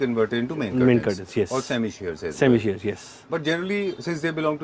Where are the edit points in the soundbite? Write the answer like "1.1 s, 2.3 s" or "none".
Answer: none